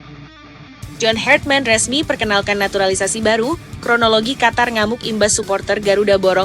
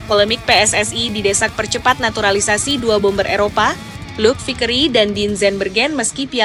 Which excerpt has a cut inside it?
first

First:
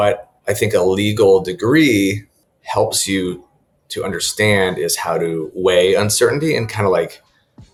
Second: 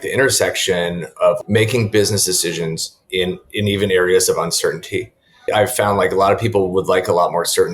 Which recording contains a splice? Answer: second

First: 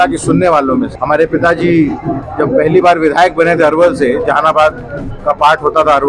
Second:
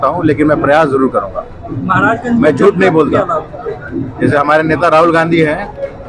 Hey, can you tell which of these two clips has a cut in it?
first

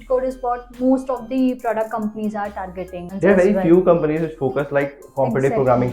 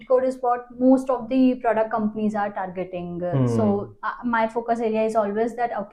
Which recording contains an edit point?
first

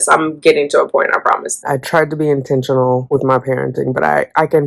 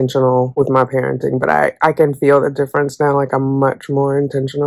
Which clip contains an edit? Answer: first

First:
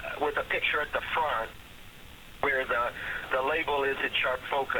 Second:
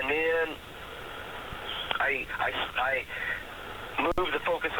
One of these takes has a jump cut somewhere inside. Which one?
second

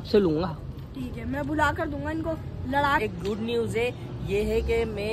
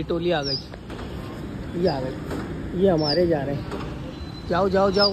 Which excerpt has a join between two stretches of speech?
first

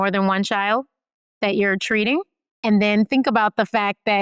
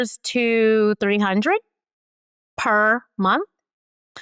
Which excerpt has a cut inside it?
first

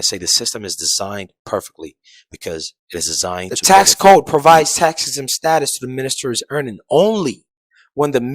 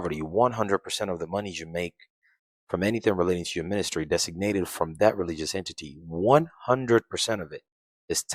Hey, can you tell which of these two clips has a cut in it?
first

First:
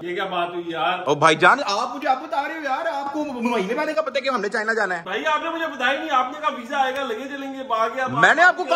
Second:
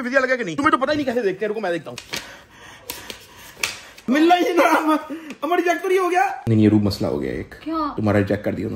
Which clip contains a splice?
second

